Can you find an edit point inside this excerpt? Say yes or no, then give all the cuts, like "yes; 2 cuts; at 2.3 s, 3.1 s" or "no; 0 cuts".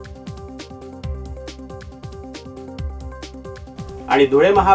yes; 1 cut; at 1.2 s